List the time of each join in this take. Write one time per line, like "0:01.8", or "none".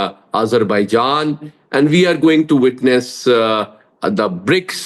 none